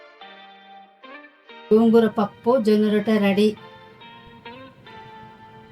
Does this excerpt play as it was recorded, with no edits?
no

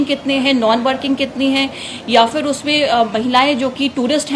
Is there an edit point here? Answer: no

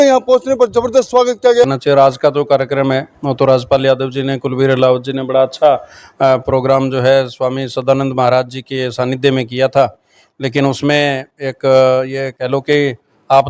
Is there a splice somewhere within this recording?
yes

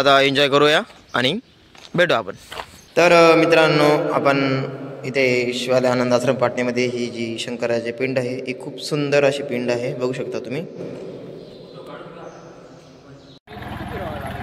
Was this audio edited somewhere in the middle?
yes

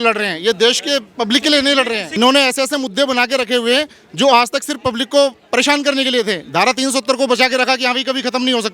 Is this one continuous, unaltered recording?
no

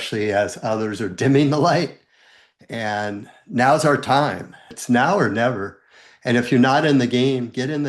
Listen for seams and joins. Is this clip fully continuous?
no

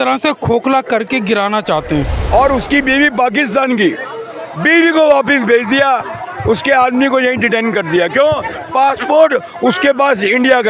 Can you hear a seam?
yes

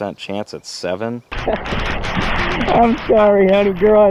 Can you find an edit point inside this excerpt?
yes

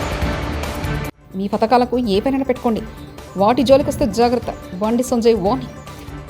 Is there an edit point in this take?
yes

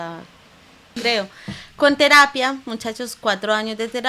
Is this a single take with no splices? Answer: no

